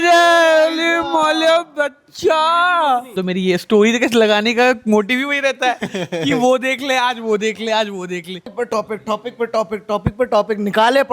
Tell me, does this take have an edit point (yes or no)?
yes